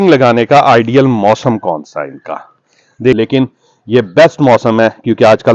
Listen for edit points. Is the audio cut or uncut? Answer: cut